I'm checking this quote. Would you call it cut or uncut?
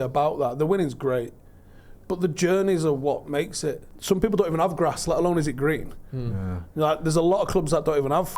cut